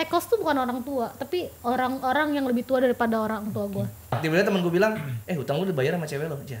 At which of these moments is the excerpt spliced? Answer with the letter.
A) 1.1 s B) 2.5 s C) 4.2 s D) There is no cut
C